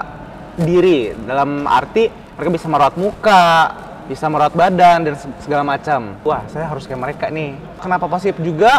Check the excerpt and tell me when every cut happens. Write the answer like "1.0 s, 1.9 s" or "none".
6.2 s, 7.8 s